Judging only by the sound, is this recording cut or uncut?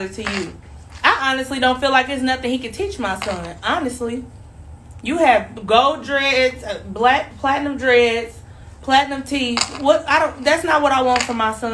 uncut